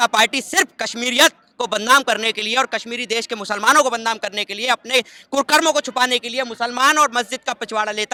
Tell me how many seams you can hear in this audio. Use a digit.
0